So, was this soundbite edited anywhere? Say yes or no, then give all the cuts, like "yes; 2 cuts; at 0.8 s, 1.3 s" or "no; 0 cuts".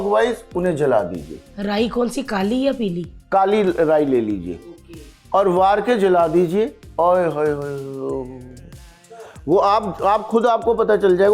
no; 0 cuts